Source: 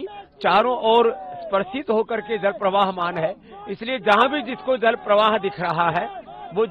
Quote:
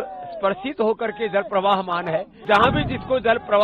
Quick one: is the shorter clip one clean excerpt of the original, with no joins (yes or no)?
no